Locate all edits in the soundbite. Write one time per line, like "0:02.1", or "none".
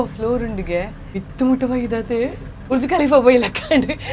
0:01.2
0:02.7